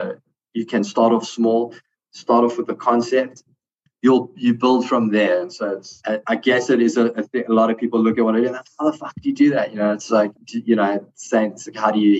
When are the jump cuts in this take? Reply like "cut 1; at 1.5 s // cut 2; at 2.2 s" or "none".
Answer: cut 1; at 3.4 s // cut 2; at 5.9 s